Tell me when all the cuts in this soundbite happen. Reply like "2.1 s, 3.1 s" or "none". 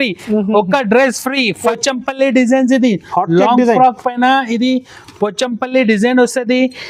1.6 s